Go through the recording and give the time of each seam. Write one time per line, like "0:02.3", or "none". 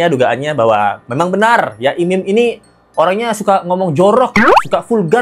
none

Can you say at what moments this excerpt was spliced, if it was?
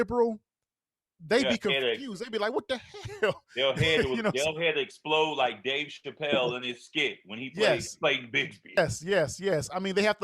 0:08.8

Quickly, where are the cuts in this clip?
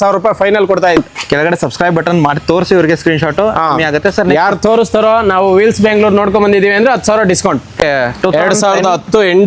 0:00.9
0:07.7

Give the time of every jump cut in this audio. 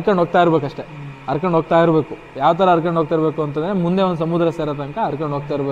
none

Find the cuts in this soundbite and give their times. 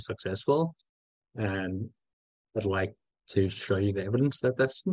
none

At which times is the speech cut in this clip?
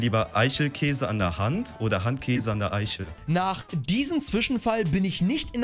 0:03.2

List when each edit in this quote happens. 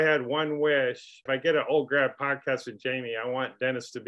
0:01.2

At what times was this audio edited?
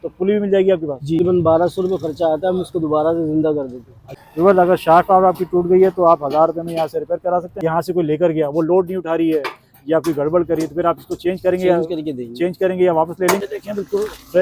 0:01.2
0:04.0
0:07.6
0:13.4

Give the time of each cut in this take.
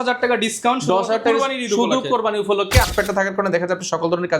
0:02.9

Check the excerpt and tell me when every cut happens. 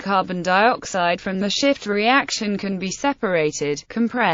0:03.4

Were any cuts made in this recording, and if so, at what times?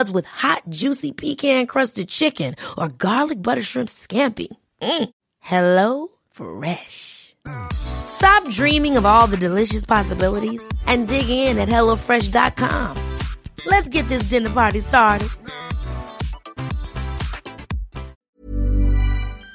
0:18.2

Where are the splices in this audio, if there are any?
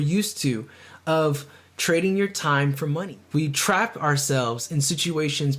0:03.0

